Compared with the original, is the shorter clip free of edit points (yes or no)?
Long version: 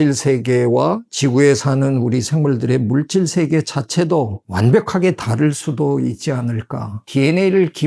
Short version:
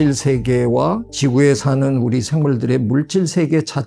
yes